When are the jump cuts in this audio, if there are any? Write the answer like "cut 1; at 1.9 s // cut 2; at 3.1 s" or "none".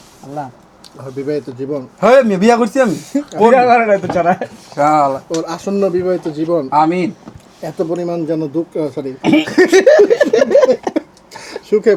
none